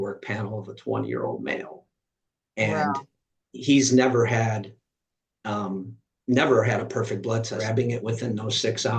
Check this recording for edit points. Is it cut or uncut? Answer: cut